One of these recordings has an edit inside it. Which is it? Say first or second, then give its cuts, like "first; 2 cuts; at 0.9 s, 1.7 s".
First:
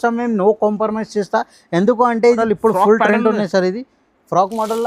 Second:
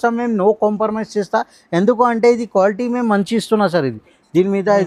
first; 1 cut; at 2.4 s